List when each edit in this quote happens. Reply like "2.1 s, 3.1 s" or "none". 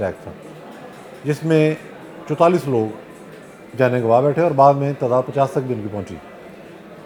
none